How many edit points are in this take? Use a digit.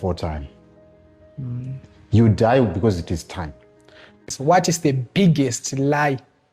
1